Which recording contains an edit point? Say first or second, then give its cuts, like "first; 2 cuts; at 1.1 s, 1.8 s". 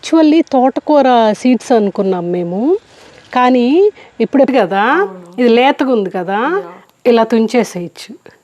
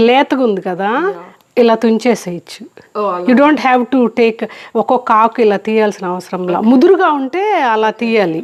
first; 1 cut; at 4.5 s